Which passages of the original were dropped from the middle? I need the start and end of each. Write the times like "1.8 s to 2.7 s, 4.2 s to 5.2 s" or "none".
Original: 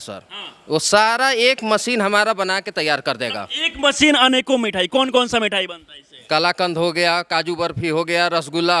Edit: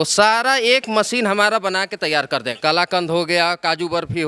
3.3 s to 6.2 s